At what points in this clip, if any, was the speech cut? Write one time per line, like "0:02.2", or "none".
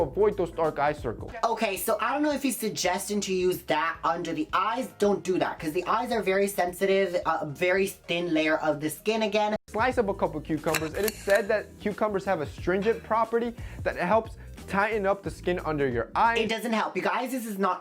0:01.2
0:09.5
0:16.5